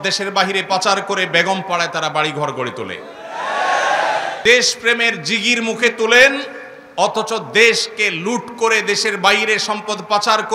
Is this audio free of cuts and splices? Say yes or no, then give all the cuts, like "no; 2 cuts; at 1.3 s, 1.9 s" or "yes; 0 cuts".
no; 1 cut; at 4.3 s